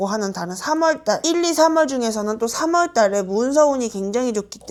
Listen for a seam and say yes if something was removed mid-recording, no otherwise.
no